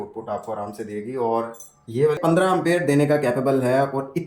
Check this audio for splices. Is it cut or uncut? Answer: cut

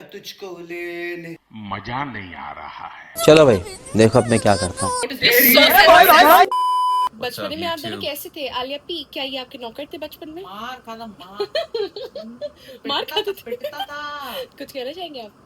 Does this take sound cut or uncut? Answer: cut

